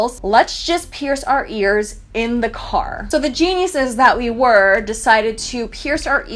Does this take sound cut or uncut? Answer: uncut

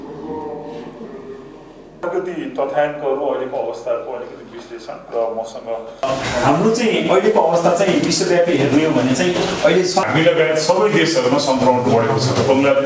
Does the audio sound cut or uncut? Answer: uncut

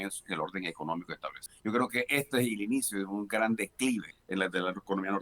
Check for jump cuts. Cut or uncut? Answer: cut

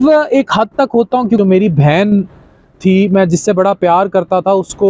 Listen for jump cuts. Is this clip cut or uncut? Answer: cut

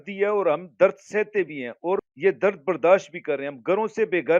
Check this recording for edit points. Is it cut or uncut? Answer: cut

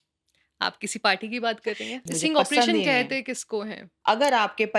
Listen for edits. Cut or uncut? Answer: cut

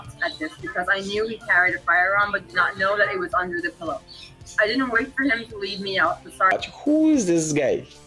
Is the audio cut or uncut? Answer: cut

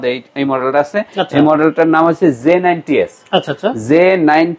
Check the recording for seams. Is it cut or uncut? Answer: uncut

